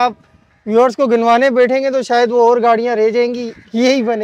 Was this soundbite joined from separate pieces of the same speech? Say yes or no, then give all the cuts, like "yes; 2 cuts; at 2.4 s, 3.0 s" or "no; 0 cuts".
no; 0 cuts